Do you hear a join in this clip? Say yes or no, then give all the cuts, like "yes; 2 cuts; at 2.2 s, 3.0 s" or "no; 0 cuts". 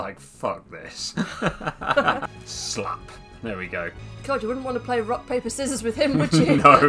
yes; 2 cuts; at 2.3 s, 4.1 s